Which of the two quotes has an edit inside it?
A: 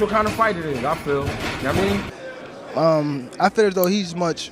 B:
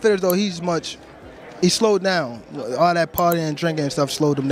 A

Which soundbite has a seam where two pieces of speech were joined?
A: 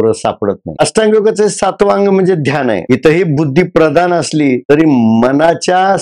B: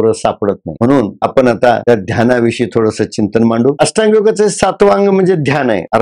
A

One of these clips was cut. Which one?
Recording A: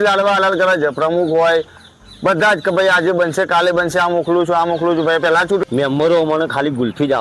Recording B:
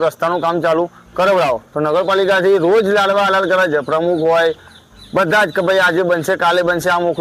A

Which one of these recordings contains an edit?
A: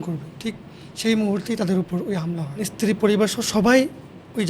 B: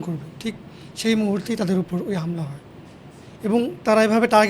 A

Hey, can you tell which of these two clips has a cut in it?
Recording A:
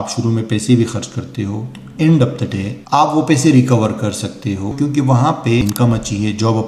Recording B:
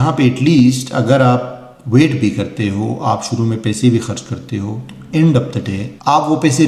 A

